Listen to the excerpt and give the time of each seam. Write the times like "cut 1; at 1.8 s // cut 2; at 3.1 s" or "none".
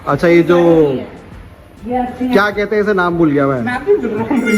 none